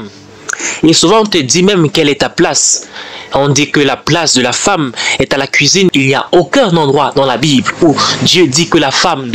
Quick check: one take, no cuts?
no; 1 cut; at 5.9 s

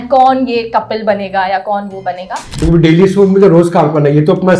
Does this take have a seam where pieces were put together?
yes; 1 cut; at 2.5 s

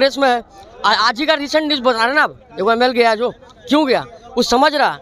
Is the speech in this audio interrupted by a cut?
no; 0 cuts

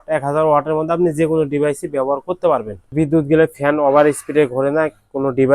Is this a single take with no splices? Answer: no; 1 cut; at 2.8 s

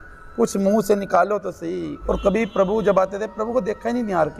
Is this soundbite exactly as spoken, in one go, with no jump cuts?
no; 1 cut; at 1.8 s

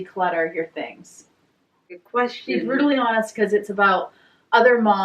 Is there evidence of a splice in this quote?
yes; 1 cut; at 2.0 s

